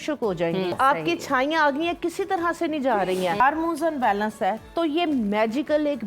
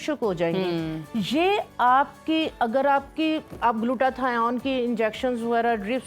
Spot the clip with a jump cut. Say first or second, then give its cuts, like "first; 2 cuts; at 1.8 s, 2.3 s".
first; 2 cuts; at 0.7 s, 3.4 s